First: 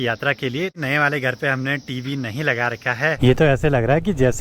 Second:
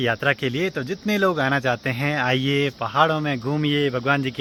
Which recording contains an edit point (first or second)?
first